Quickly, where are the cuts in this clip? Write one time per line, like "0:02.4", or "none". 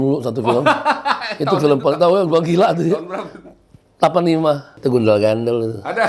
0:04.7